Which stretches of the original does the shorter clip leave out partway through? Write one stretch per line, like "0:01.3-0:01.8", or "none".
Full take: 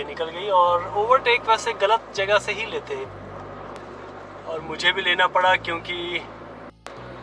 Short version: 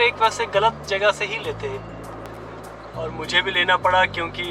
0:03.6-0:03.8